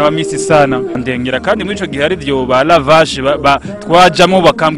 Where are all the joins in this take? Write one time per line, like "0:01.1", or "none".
0:01.0